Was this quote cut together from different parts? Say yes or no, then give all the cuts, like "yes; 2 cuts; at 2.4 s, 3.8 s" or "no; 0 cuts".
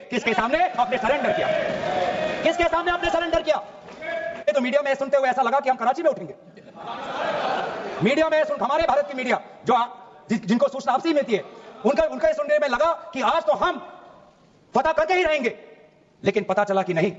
no; 0 cuts